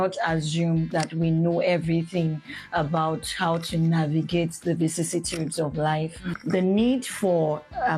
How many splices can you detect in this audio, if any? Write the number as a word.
one